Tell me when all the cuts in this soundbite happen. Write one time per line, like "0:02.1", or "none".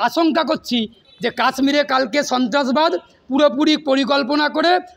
0:01.0